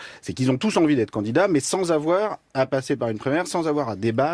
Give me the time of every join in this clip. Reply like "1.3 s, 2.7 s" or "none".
3.2 s